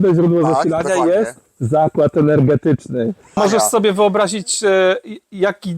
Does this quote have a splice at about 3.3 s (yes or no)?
yes